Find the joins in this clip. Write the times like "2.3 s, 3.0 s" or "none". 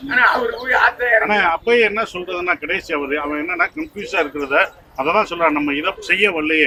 none